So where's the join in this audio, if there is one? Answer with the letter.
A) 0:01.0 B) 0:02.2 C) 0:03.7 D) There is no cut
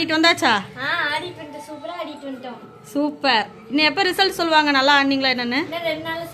D